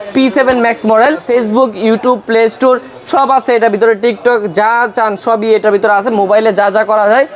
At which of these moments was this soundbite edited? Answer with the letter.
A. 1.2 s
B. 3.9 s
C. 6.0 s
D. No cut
A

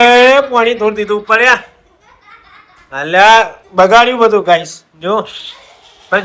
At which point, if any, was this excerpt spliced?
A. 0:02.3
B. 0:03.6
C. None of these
C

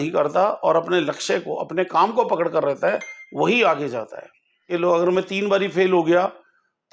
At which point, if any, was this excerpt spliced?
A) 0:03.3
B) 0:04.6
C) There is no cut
B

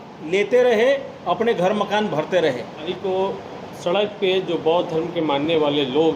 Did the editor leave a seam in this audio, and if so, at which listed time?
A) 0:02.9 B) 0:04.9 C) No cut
A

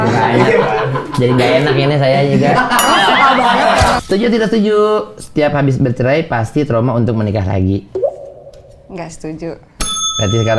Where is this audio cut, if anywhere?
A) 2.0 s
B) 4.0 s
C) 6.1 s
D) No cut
B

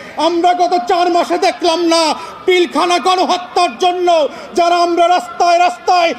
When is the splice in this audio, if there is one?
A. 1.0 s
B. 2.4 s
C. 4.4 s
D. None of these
D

